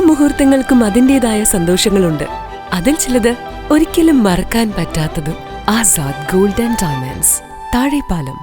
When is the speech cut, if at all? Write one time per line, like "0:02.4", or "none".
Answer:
none